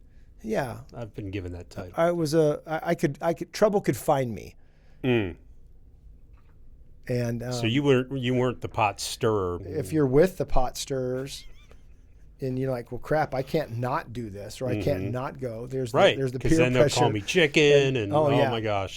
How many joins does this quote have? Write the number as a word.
two